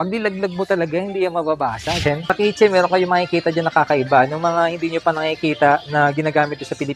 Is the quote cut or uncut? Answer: cut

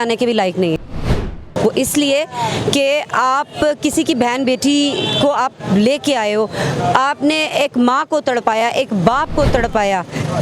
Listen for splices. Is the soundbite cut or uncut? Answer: cut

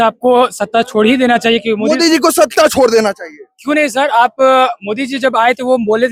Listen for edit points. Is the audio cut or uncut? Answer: uncut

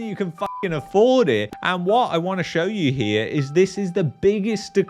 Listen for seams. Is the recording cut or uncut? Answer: cut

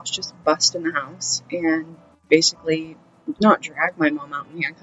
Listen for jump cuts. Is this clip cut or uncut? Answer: uncut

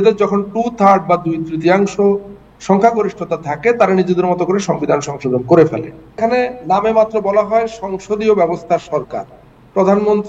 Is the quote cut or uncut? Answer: cut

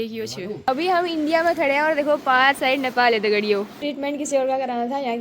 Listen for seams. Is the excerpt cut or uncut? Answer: cut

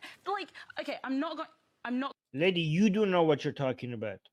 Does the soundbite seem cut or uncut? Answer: uncut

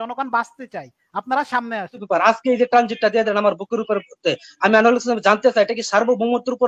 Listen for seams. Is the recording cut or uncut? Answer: cut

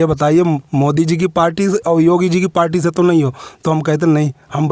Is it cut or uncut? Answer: uncut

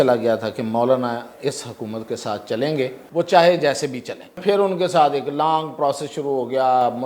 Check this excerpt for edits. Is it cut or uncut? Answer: cut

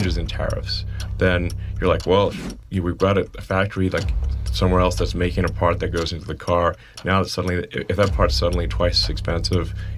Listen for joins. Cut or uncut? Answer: uncut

